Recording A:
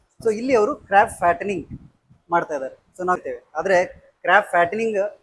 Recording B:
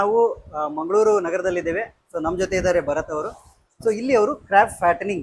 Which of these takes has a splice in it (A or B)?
A